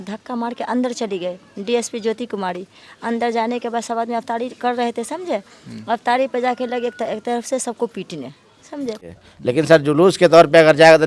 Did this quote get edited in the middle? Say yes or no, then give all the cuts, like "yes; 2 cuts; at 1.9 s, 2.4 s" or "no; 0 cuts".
yes; 1 cut; at 9.0 s